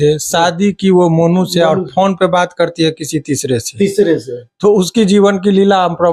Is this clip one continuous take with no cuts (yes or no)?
yes